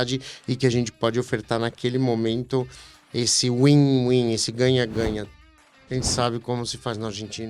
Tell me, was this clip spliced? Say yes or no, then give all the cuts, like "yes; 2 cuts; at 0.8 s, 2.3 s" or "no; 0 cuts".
yes; 1 cut; at 5.3 s